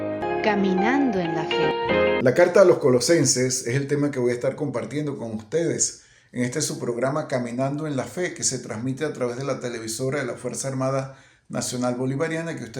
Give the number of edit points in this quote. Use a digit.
1